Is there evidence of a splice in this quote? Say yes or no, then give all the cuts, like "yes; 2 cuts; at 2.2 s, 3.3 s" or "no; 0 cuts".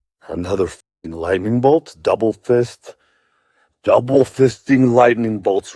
no; 0 cuts